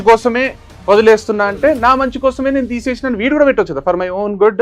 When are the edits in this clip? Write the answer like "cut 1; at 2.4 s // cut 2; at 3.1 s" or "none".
none